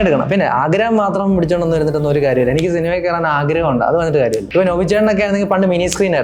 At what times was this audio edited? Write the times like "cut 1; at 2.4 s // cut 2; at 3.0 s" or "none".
cut 1; at 4.4 s